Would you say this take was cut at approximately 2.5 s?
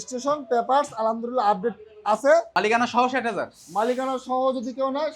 yes; 1 cut; at 2.5 s

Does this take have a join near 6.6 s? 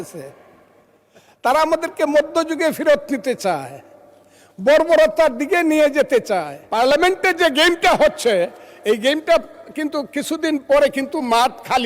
yes; 1 cut; at 6.6 s

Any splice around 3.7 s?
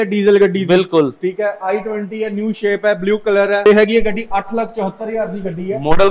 yes; 1 cut; at 3.7 s

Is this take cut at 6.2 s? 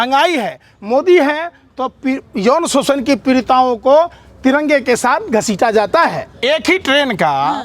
yes; 1 cut; at 6.2 s

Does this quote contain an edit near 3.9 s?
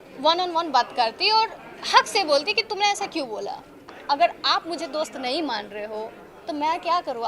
yes; 1 cut; at 3.9 s

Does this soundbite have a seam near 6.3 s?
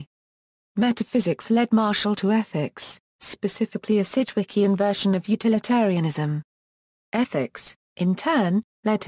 no; 0 cuts

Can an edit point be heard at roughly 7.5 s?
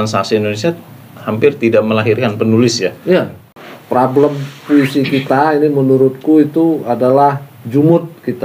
yes; 2 cuts; at 3.4 s, 7.5 s

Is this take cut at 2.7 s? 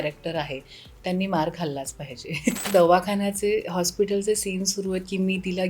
yes; 1 cut; at 2.7 s

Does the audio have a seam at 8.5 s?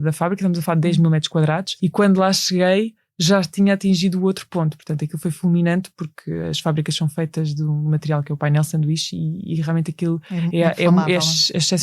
no; 1 cut; at 1.7 s

